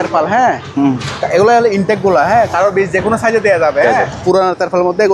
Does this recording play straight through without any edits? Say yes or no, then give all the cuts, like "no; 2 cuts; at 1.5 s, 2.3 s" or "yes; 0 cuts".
no; 2 cuts; at 2.7 s, 4.2 s